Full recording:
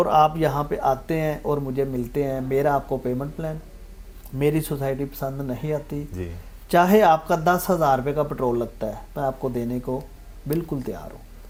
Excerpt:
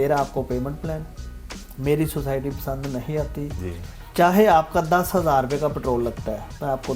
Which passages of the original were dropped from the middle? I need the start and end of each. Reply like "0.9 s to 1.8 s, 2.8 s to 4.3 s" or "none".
none